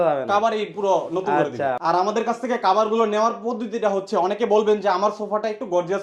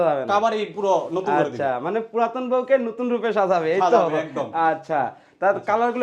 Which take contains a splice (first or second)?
first